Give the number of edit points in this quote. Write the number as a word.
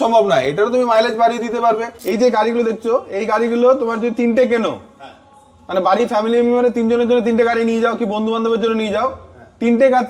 one